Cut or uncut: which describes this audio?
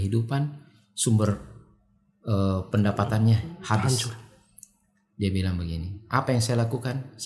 uncut